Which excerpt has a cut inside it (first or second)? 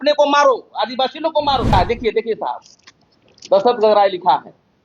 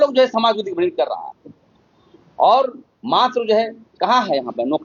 first